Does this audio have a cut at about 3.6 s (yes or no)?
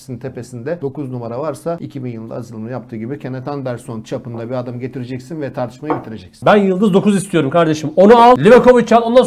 no